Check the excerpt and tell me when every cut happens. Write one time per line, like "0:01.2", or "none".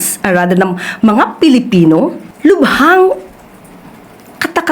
0:02.2